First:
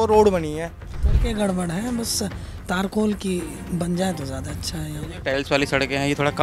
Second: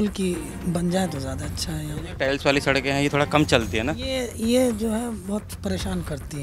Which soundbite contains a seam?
first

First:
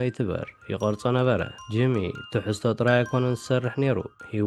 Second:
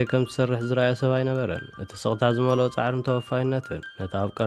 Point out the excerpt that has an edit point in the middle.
first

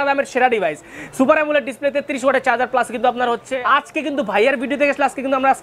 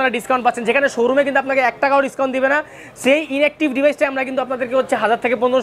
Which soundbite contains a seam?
first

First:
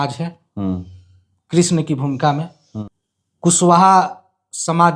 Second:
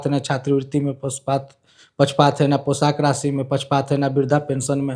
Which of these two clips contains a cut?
first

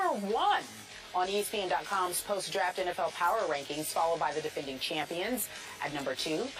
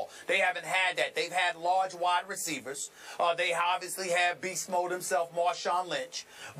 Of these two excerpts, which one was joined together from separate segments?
first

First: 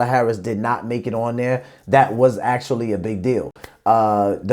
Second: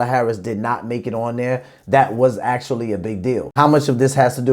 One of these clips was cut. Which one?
second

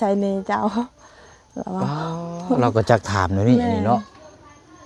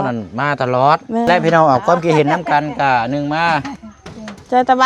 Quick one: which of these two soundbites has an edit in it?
second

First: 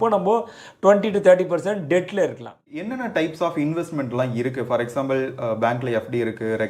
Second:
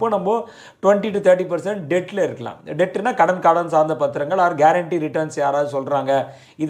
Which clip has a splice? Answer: first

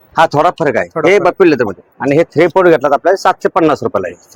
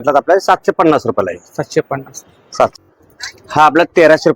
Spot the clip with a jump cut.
second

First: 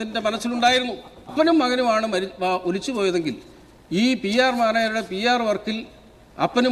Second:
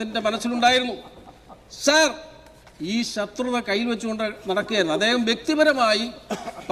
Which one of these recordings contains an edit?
first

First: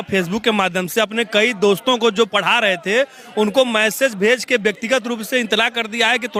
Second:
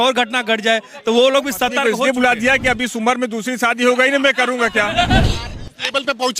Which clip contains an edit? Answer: second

